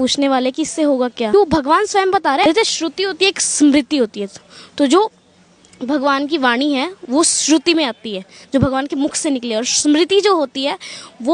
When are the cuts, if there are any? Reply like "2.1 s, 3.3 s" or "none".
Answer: 1.3 s, 2.4 s